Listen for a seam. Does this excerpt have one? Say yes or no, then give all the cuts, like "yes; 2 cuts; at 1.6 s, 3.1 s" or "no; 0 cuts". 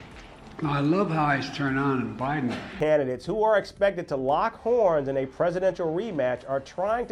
yes; 1 cut; at 2.7 s